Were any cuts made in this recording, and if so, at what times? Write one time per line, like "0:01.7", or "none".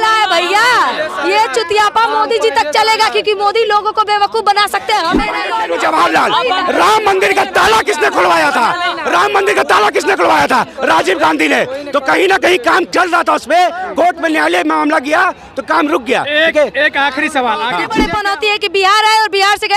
0:05.3
0:18.0